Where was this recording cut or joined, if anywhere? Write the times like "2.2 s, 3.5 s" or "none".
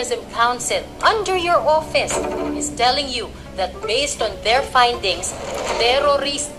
0.9 s

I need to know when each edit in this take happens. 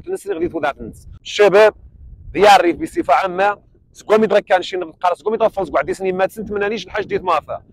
1.2 s

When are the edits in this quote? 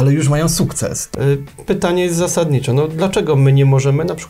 1.0 s

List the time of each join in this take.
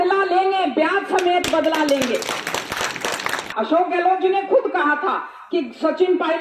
3.5 s

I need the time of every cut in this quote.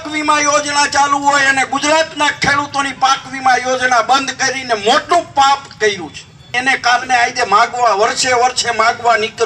6.5 s

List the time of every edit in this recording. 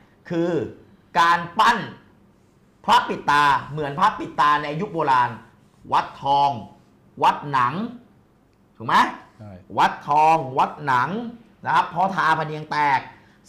none

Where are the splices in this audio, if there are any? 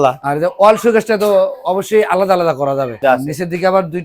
2.9 s

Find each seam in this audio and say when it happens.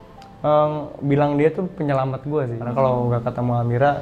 2.6 s

